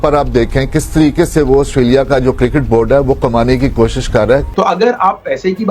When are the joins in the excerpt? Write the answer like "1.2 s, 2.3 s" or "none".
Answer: 4.5 s